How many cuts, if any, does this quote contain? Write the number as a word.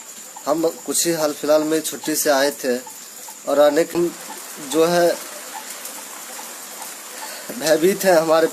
one